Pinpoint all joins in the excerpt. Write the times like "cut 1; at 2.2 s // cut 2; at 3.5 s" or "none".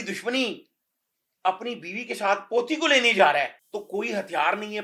cut 1; at 3.6 s